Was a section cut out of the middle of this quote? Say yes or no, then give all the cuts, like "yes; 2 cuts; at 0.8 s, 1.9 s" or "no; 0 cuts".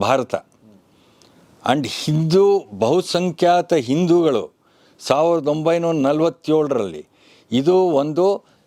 no; 0 cuts